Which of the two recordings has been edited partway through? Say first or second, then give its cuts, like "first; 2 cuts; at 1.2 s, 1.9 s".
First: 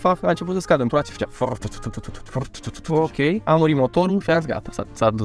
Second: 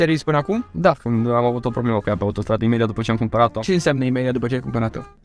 second; 1 cut; at 3.6 s